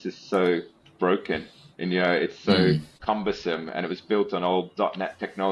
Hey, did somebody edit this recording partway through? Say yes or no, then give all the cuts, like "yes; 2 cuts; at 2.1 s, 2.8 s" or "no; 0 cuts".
yes; 1 cut; at 2.9 s